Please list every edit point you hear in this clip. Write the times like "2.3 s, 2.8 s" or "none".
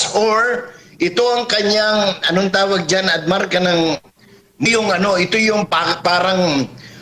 4.7 s

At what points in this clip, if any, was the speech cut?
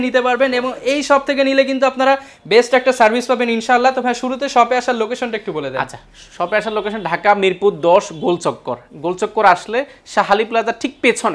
none

